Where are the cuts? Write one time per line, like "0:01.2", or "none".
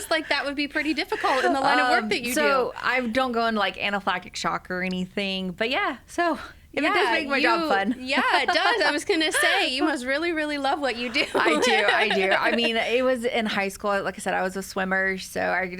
0:05.5